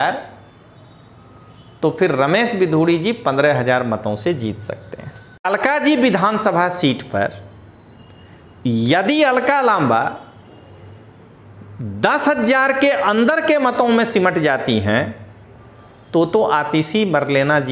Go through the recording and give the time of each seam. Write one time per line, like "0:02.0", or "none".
0:05.5